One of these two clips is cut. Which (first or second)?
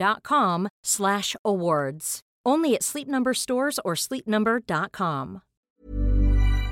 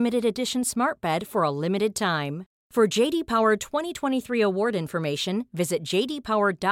first